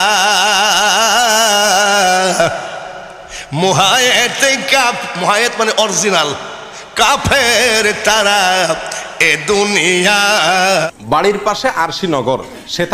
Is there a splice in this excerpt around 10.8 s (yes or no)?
yes